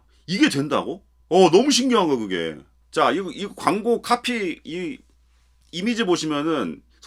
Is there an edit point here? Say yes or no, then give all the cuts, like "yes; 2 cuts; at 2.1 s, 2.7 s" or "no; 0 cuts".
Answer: no; 0 cuts